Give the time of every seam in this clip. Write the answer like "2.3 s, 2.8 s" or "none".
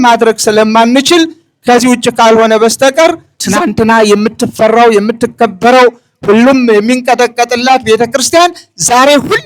3.3 s

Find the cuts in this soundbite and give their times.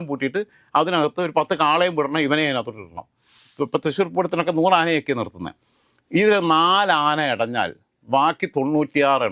3.4 s

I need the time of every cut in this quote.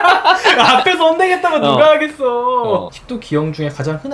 3.0 s

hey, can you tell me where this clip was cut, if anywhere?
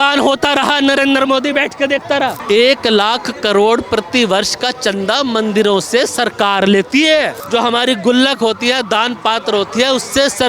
2.4 s, 7.4 s

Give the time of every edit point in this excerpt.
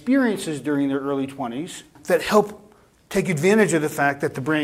1.9 s

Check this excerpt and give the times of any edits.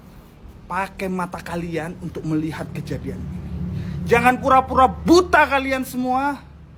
none

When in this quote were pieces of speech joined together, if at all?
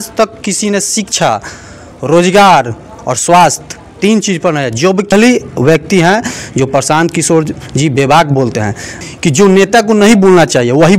5.1 s, 9.0 s

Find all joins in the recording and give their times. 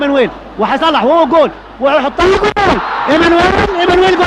0.9 s

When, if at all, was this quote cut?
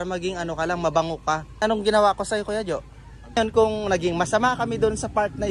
1.6 s, 3.4 s

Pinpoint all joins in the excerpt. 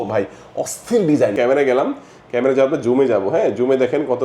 1.3 s

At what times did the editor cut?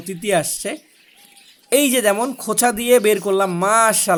none

